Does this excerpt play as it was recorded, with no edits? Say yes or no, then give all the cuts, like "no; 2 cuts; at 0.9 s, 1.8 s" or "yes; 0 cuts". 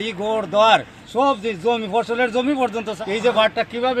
no; 1 cut; at 1.0 s